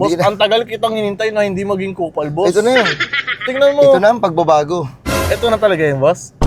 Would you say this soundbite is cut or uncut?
uncut